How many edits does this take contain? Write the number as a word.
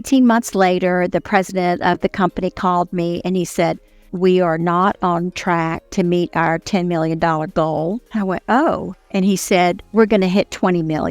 three